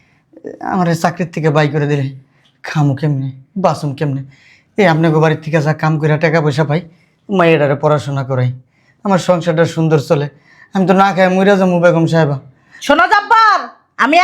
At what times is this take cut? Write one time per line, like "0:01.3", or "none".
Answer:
none